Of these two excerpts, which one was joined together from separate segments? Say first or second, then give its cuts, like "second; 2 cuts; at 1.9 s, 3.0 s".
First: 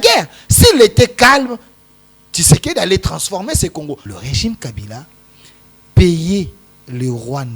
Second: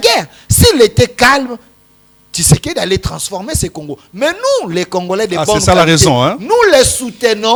first; 1 cut; at 4.1 s